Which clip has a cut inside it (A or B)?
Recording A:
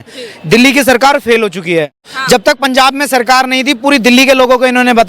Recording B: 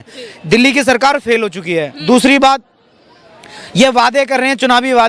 A